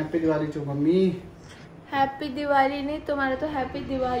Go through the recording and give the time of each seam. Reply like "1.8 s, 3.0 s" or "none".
none